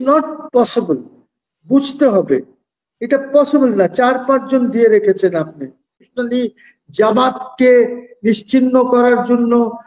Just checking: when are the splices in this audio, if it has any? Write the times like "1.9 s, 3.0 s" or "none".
6.1 s

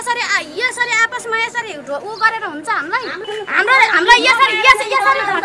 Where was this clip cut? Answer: 3.2 s

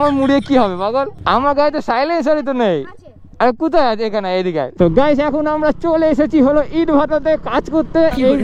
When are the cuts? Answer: 4.7 s

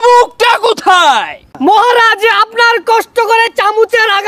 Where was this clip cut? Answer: 1.5 s

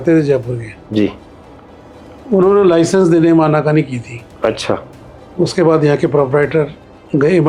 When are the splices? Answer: none

